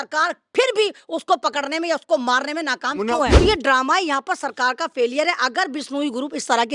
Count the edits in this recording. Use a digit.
1